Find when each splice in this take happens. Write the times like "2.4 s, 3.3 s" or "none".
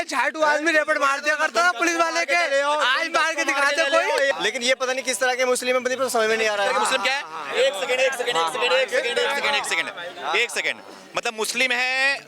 4.4 s

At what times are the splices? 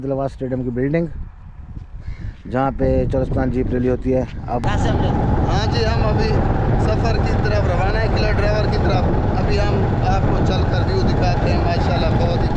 4.6 s

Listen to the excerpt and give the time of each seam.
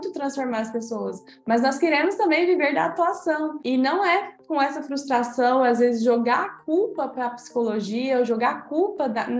none

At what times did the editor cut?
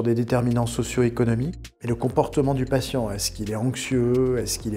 1.6 s

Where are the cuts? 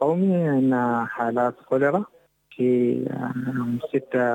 2.5 s

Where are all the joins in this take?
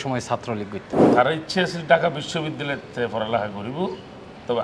1.1 s

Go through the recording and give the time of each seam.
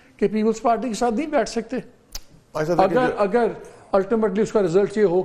none

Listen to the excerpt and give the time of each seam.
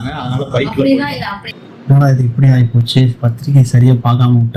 1.4 s

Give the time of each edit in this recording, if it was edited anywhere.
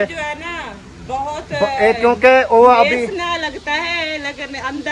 none

